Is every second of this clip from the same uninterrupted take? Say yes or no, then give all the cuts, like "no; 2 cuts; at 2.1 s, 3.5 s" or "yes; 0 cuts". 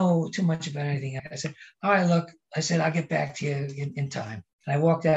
no; 2 cuts; at 1.2 s, 4.1 s